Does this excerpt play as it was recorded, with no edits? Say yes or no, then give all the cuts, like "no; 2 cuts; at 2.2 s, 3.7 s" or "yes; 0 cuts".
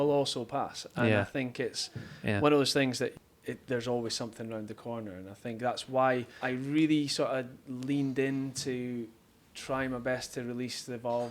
no; 1 cut; at 6.3 s